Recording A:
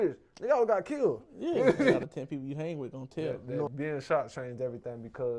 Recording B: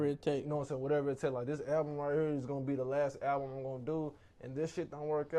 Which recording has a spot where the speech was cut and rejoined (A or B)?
A